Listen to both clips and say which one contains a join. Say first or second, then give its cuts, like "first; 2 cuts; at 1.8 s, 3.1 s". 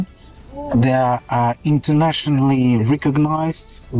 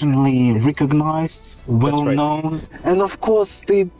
second; 1 cut; at 2.7 s